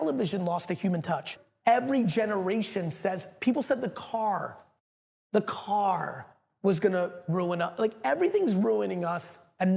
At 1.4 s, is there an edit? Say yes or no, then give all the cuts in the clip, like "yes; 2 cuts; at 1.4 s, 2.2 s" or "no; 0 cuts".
yes; 1 cut; at 1.4 s